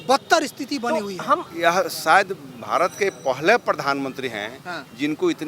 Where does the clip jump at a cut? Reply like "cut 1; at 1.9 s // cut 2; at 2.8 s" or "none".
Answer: cut 1; at 1.4 s